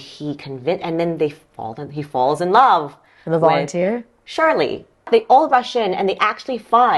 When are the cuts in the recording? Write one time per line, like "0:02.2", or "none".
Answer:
0:05.1